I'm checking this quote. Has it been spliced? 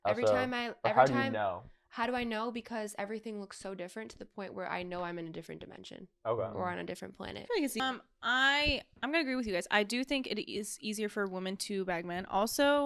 yes; 1 cut; at 7.8 s

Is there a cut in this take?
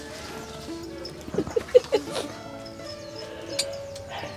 no; 0 cuts

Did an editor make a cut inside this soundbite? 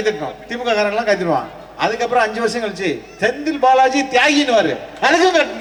no; 0 cuts

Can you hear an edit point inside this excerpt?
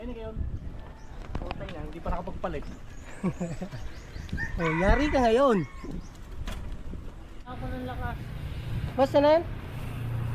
yes; 1 cut; at 7.4 s

